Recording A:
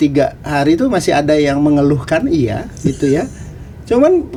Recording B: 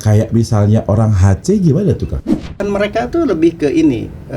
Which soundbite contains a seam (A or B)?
B